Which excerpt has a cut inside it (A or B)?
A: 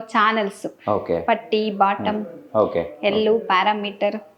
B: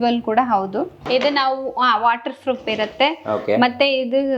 B